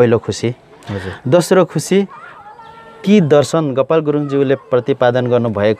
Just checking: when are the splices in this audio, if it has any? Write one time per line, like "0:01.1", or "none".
none